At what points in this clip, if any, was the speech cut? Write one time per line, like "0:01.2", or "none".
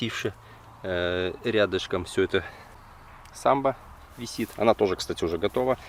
none